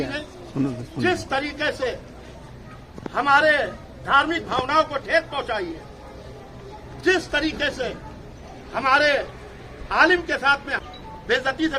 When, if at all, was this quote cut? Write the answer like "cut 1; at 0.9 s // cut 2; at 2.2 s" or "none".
cut 1; at 10.8 s